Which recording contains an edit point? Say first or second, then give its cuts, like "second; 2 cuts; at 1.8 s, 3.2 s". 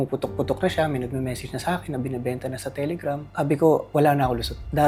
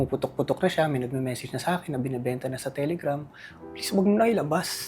second; 1 cut; at 3.3 s